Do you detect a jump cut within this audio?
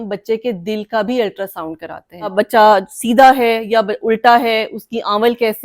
yes; 1 cut; at 2.3 s

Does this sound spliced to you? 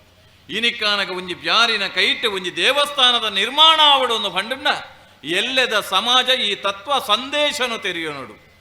no; 0 cuts

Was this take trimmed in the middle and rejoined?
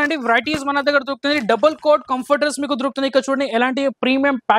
no; 0 cuts

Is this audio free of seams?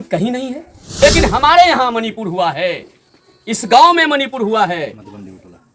no; 1 cut; at 1.0 s

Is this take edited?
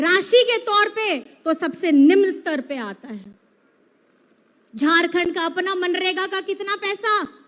no; 0 cuts

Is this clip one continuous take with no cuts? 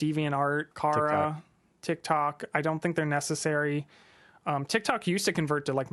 yes; 0 cuts

